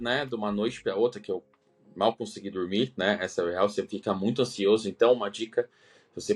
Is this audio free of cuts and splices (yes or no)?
yes